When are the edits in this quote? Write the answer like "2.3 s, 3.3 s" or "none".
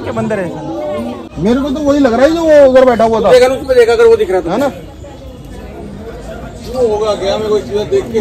1.3 s